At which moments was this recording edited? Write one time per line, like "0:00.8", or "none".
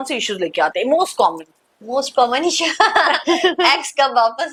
none